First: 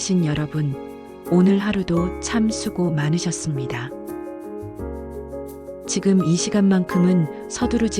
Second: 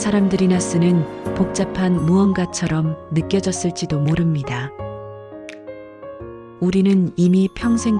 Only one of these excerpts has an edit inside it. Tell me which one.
first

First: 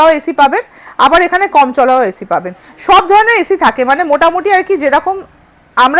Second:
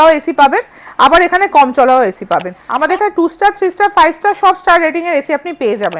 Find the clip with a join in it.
second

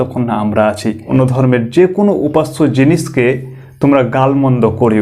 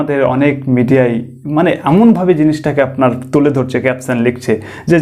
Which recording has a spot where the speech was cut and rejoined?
first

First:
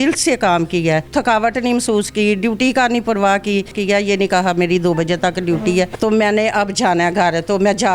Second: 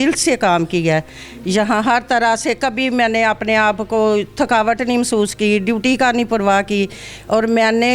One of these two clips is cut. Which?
first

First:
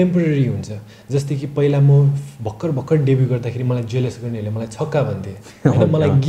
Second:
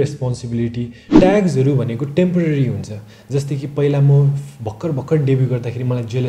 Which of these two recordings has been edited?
second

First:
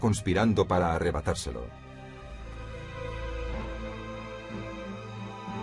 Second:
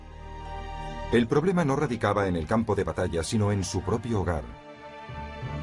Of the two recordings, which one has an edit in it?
second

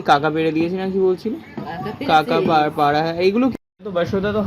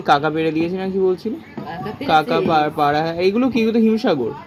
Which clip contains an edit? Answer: first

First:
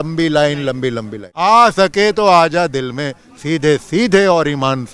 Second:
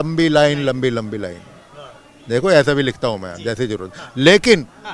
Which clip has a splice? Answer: first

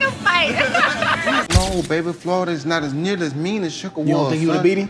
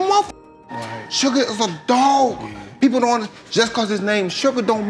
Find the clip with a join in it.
first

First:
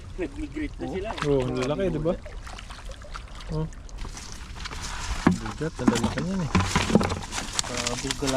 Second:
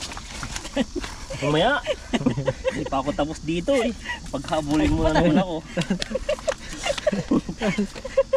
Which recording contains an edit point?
first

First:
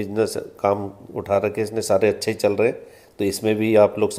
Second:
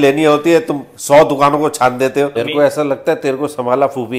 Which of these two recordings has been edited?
second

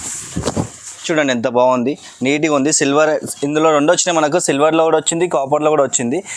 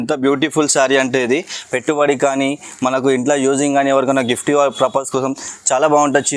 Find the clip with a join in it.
first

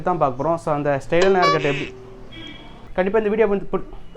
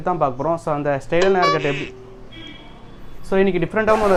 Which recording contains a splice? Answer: first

